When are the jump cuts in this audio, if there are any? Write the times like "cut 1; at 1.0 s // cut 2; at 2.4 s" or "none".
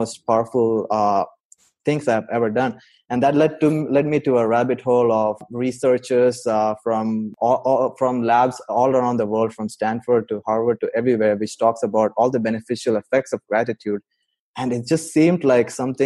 cut 1; at 5.5 s // cut 2; at 7.3 s

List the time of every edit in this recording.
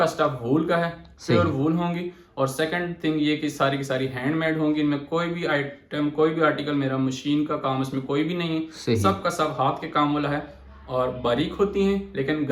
none

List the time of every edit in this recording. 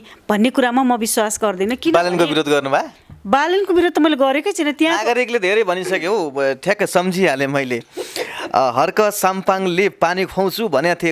none

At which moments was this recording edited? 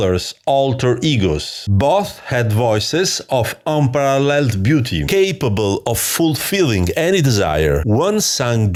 none

